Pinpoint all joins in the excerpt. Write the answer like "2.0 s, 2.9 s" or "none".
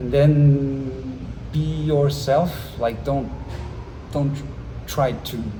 none